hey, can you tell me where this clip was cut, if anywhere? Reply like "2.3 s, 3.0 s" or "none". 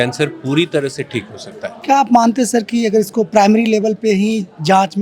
none